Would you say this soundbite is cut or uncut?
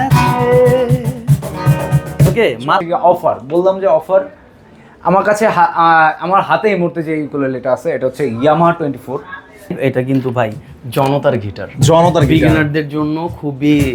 cut